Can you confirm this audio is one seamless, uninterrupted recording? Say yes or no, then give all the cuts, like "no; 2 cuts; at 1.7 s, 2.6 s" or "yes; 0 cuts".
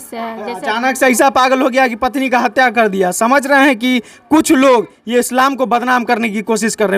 yes; 0 cuts